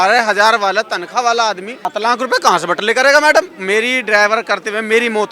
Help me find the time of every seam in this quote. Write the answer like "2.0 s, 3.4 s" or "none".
1.9 s, 3.6 s